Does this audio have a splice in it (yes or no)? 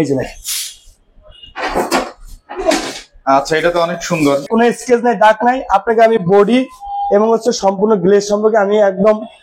yes